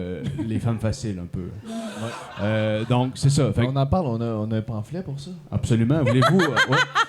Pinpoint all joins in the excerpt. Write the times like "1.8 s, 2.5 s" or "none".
none